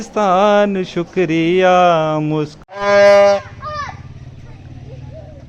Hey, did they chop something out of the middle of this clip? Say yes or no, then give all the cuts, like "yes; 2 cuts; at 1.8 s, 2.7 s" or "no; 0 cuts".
yes; 1 cut; at 2.6 s